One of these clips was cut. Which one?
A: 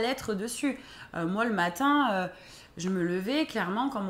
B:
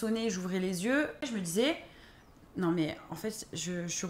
B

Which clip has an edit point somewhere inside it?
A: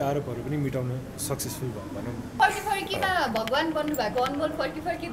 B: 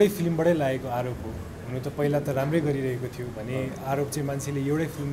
A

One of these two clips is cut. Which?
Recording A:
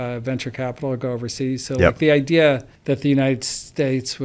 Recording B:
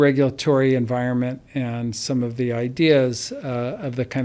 A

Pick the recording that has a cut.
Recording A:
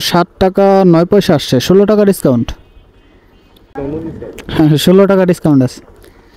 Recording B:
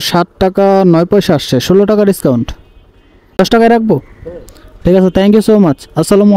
B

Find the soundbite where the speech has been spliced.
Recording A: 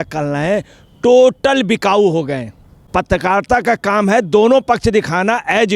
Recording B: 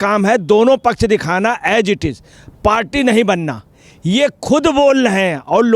A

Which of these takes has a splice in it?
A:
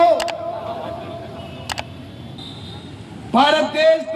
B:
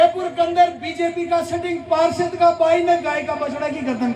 A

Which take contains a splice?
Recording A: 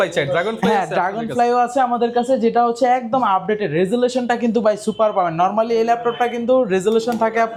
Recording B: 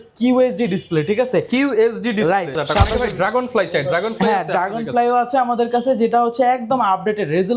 B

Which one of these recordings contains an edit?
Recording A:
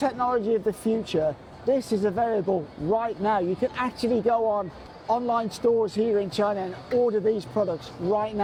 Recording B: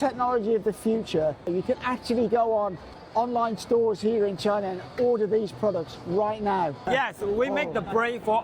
B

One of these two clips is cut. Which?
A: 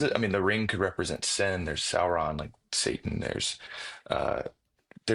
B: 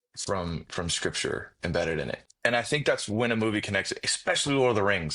B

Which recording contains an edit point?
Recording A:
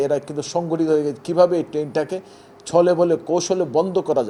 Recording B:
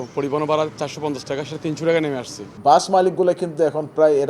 B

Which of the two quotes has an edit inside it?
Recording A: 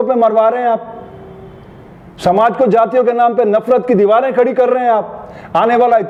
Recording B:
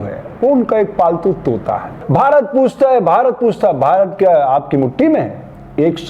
B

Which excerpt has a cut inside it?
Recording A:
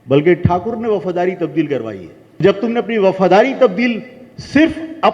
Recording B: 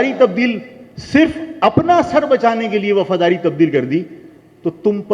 A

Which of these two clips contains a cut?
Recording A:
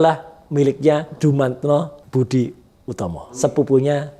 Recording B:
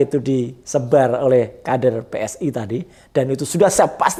A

